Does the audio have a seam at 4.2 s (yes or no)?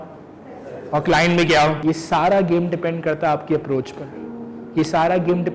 no